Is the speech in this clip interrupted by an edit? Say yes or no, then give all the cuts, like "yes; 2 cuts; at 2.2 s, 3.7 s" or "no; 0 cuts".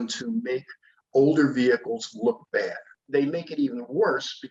yes; 1 cut; at 3.0 s